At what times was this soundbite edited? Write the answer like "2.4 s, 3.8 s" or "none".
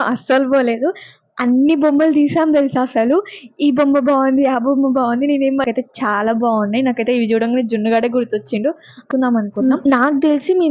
5.6 s, 9.0 s